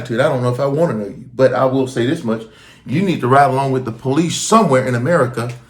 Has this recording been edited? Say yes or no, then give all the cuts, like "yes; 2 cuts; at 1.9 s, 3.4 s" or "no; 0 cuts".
no; 0 cuts